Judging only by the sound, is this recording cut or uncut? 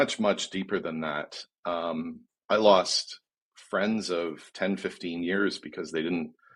uncut